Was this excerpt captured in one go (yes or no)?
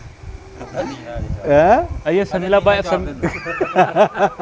yes